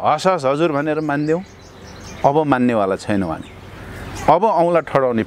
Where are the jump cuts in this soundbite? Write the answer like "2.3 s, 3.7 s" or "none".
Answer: none

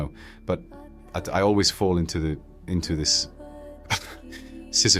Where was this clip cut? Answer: none

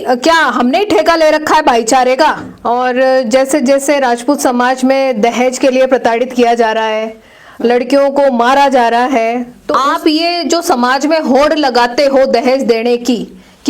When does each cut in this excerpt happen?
2.5 s, 9.6 s

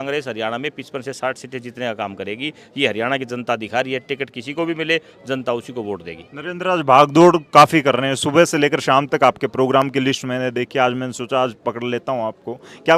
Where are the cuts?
none

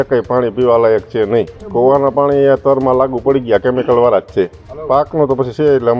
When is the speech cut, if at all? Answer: 1.6 s, 4.7 s

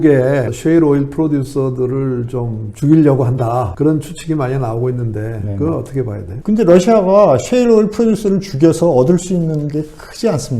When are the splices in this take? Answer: 3.7 s, 6.3 s

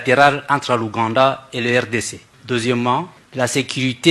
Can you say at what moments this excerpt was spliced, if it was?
2.3 s, 3.2 s

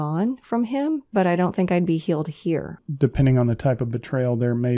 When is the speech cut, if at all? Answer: 2.8 s

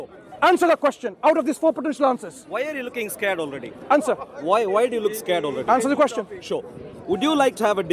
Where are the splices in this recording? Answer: none

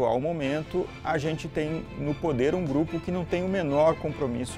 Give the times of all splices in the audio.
none

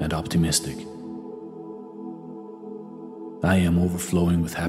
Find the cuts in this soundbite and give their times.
1.0 s, 3.1 s

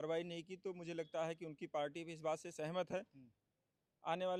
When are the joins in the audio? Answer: none

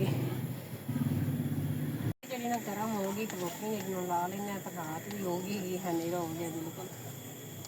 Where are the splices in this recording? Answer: 2.1 s

